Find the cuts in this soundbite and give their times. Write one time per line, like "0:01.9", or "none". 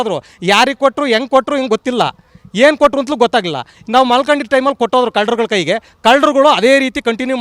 none